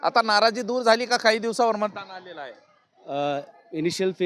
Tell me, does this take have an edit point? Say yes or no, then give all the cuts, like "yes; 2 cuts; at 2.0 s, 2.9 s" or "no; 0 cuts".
no; 0 cuts